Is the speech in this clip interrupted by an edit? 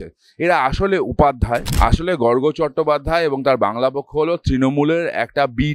yes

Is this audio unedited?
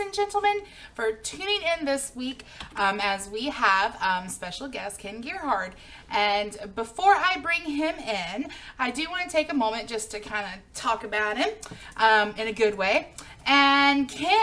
yes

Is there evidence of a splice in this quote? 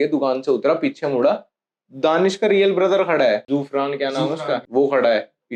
yes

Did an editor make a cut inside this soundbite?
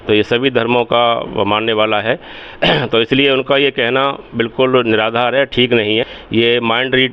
yes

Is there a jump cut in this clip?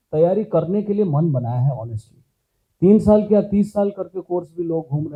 no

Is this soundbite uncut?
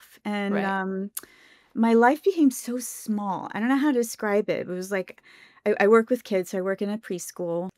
yes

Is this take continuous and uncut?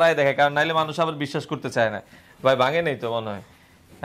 yes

